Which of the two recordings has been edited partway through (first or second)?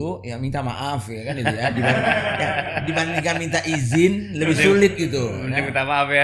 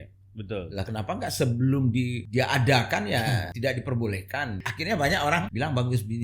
second